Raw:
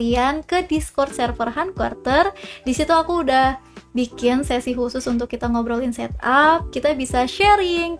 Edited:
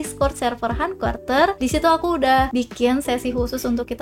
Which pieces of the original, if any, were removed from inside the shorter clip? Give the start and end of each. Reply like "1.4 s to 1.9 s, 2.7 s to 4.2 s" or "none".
2.3 s to 2.6 s, 3.5 s to 3.9 s